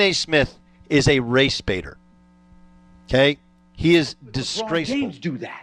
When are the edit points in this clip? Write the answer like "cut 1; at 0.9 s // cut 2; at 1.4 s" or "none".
cut 1; at 4.7 s